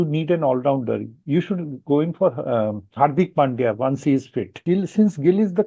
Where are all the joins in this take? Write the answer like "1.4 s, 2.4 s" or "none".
4.5 s